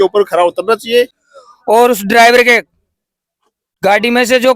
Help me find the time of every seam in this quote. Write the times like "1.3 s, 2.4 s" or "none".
1.2 s